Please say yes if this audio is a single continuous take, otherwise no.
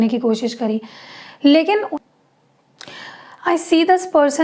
no